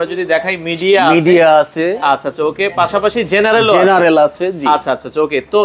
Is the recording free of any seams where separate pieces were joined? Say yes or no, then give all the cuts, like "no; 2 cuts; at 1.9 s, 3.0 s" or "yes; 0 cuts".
yes; 0 cuts